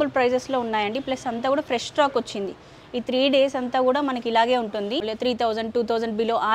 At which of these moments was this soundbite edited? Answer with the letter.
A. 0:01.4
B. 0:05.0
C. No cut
B